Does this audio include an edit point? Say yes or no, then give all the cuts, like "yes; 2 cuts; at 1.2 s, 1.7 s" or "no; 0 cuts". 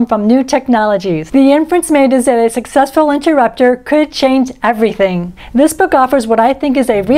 yes; 1 cut; at 1.2 s